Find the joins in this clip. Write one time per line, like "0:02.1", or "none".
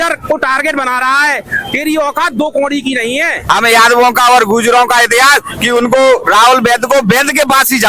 0:03.4